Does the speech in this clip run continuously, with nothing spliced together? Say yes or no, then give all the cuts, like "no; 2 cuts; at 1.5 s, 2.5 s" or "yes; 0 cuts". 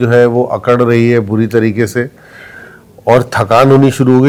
yes; 0 cuts